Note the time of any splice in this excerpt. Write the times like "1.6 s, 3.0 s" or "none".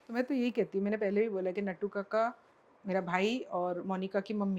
none